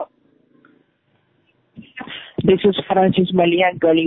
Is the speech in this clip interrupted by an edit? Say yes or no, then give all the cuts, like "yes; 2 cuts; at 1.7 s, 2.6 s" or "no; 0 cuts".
no; 0 cuts